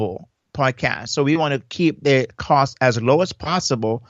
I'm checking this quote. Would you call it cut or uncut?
uncut